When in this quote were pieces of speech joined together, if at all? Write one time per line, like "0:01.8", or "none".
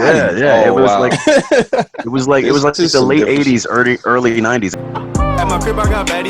0:04.7